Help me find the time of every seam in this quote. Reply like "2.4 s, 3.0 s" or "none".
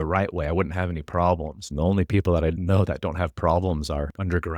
1.6 s, 2.6 s